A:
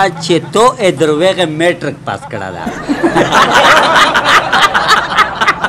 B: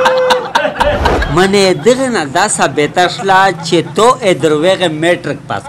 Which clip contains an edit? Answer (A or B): B